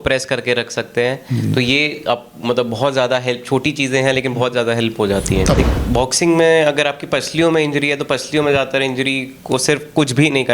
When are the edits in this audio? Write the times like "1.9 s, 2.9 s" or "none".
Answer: 5.6 s